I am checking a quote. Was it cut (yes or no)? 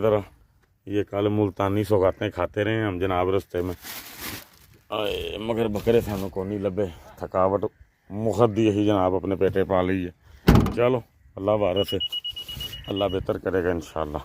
no